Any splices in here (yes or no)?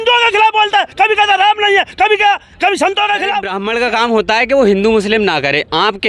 yes